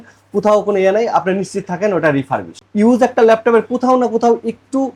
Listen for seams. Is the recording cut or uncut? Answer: uncut